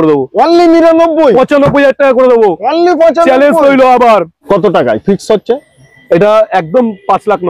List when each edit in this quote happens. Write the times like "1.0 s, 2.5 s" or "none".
4.3 s

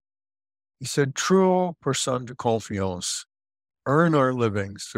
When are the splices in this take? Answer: none

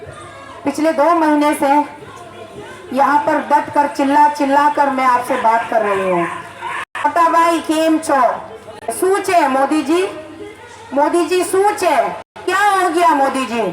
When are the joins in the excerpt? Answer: 7.0 s, 8.9 s, 12.4 s

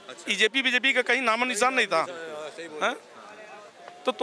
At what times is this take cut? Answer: none

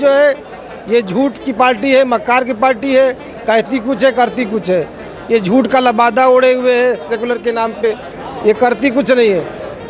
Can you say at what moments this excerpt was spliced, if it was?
none

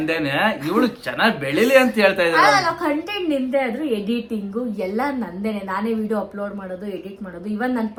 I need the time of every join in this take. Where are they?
none

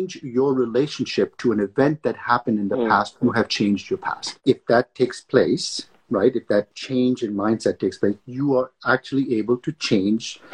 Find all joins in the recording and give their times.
4.3 s, 6.8 s

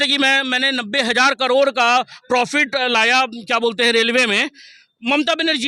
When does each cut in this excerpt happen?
none

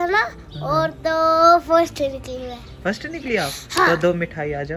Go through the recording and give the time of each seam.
none

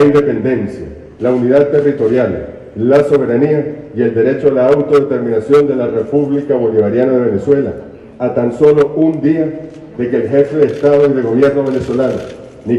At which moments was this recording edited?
3.2 s

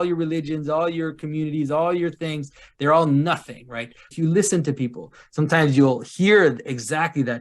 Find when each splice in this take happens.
4.0 s

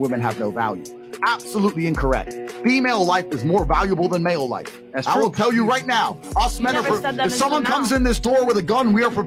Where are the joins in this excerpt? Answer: none

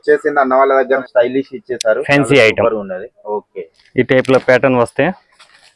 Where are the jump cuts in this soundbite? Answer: 1.0 s

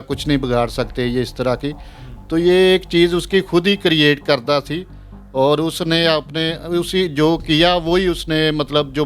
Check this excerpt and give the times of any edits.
none

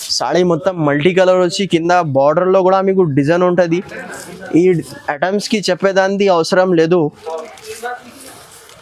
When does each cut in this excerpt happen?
none

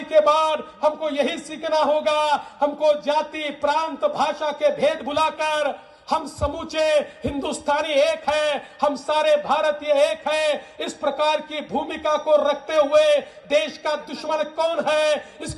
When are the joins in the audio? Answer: none

